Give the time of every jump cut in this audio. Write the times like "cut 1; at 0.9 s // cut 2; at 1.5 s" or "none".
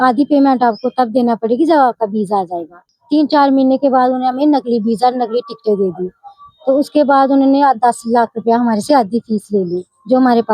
cut 1; at 2.9 s